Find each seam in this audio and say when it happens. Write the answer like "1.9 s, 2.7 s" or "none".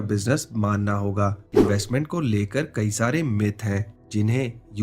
1.5 s